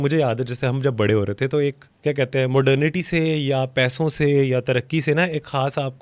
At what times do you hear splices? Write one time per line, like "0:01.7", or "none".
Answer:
0:01.9